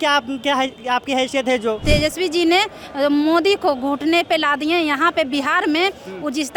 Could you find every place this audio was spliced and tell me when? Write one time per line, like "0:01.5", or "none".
0:01.8